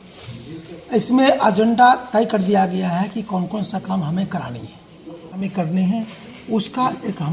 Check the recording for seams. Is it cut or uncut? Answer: cut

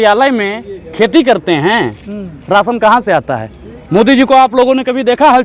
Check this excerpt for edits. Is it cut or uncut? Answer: uncut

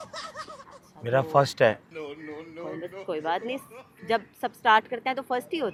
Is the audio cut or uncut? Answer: uncut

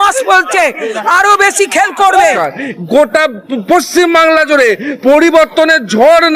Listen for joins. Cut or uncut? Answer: cut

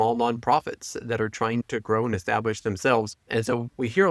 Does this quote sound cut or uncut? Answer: cut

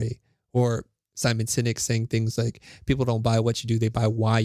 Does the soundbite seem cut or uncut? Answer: uncut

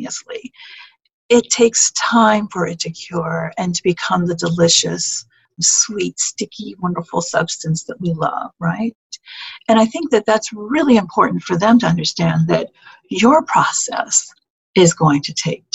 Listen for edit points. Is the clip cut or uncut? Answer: cut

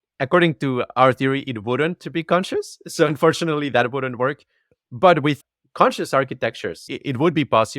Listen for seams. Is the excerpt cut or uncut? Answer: cut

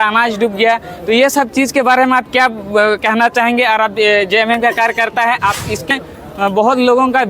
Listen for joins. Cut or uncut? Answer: cut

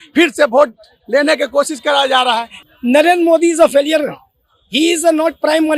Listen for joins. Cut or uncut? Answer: cut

